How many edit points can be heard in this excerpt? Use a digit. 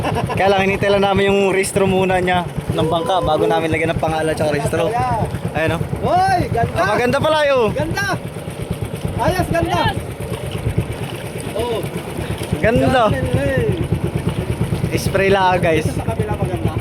0